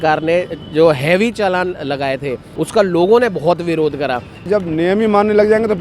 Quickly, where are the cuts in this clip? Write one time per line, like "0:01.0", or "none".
0:02.5
0:04.5